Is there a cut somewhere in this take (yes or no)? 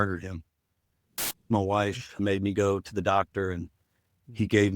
yes